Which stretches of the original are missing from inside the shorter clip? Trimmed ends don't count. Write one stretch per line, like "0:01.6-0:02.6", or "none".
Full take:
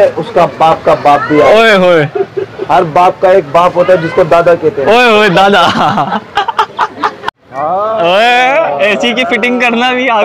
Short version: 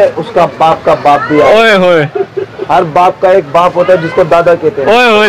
none